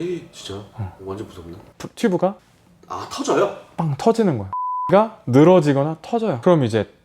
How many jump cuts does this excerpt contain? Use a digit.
2